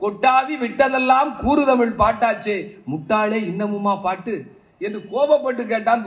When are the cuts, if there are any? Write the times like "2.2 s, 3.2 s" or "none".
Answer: none